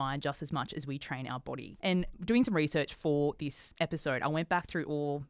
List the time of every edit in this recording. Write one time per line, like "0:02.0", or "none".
none